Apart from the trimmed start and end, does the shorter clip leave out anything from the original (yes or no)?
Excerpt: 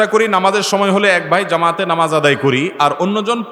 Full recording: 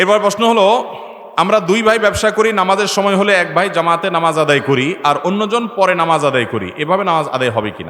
no